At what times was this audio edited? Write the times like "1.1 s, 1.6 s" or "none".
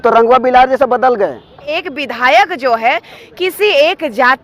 1.8 s